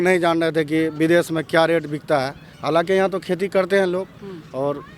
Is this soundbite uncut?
yes; 0 cuts

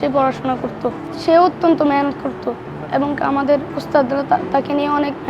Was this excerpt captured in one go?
no; 1 cut; at 1.1 s

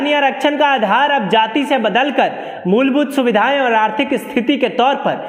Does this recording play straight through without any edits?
yes; 0 cuts

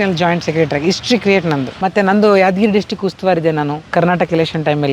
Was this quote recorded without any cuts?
no; 1 cut; at 1.7 s

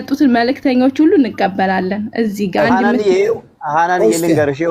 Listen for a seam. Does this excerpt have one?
no; 0 cuts

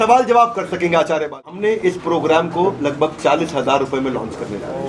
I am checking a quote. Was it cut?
yes; 1 cut; at 1.5 s

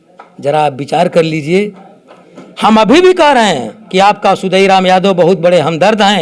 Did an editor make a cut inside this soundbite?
no; 0 cuts

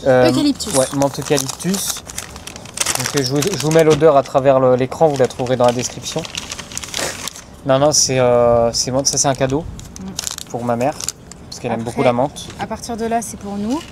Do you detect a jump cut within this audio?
no; 0 cuts

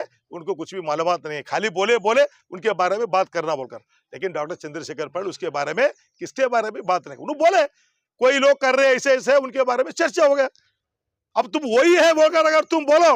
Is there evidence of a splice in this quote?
no; 0 cuts

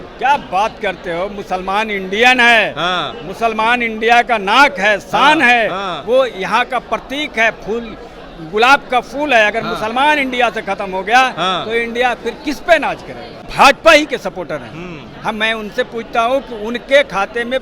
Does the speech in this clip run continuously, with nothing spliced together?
no; 1 cut; at 13.5 s

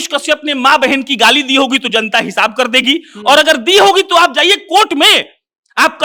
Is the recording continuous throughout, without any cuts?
yes; 0 cuts

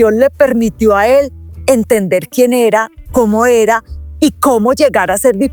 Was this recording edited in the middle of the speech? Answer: no; 0 cuts

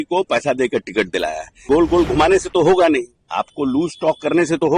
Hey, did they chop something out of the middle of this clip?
yes; 1 cut; at 1.6 s

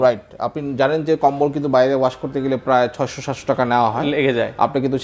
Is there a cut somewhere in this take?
no; 0 cuts

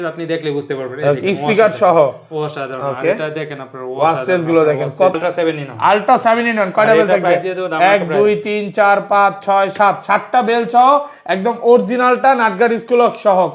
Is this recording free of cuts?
no; 1 cut; at 5.1 s

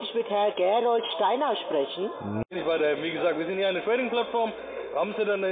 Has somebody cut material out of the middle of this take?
yes; 1 cut; at 2.5 s

